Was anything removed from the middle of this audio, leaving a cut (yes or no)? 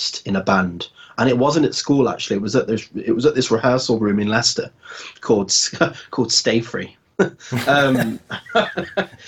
no